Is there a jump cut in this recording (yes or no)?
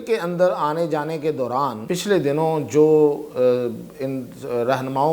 yes